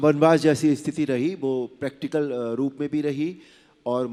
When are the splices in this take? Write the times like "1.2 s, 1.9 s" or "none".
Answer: none